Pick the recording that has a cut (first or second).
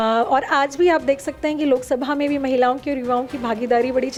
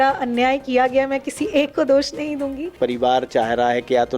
second